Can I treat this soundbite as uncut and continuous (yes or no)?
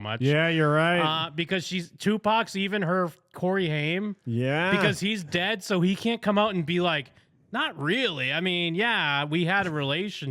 yes